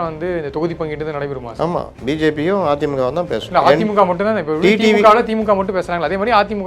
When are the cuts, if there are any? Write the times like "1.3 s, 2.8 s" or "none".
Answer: 3.4 s